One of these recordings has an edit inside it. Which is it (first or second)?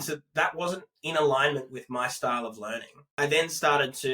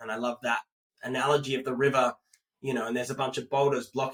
first